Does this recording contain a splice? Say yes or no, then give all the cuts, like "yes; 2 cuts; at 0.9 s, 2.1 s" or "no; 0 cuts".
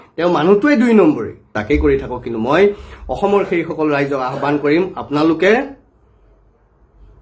yes; 1 cut; at 1.5 s